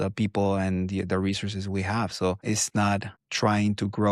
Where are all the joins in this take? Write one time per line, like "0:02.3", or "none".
none